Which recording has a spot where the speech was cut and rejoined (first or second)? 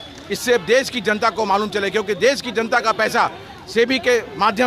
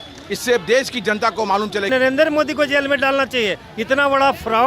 second